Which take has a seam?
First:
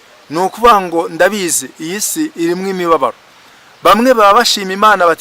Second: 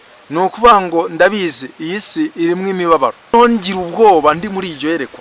second; 1 cut; at 3.3 s

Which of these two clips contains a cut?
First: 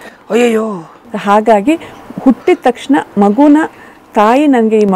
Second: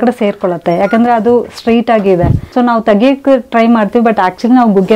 second; 1 cut; at 2.4 s

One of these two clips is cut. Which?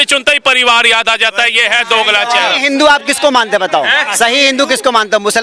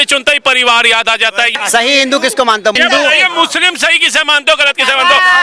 second; 2 cuts; at 1.6 s, 2.8 s

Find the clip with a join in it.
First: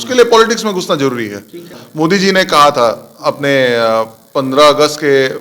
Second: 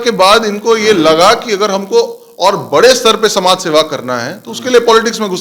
first; 1 cut; at 1.8 s

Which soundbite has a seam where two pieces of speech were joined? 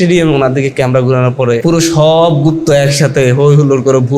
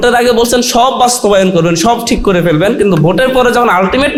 first; 1 cut; at 1.6 s

